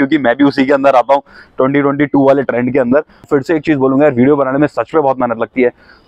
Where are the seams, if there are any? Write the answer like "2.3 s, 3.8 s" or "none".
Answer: 3.2 s